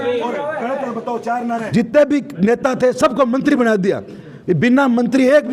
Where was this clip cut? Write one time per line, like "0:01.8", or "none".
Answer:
0:01.6